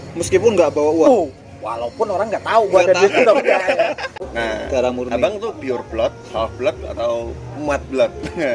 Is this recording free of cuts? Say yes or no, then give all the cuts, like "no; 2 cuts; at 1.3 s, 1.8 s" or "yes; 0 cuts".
no; 1 cut; at 4.3 s